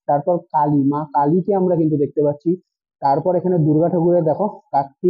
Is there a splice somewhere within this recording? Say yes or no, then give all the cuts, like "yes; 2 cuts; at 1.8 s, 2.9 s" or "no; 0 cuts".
no; 0 cuts